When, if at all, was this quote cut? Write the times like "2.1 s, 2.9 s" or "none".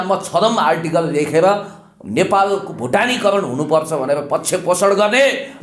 none